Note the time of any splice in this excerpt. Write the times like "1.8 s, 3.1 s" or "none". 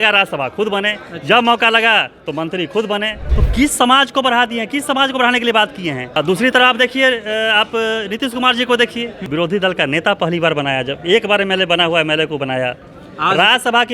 3.2 s, 6.1 s, 9.2 s